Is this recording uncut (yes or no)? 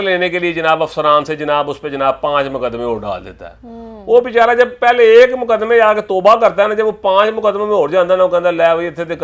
yes